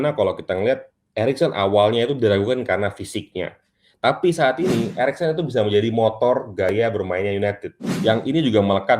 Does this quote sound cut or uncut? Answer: cut